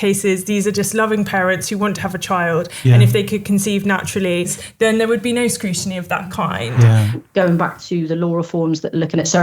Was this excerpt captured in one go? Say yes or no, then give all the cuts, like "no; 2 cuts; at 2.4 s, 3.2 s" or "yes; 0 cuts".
no; 2 cuts; at 4.6 s, 7.1 s